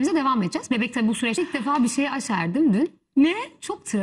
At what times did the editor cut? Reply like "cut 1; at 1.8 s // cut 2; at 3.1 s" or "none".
cut 1; at 1.4 s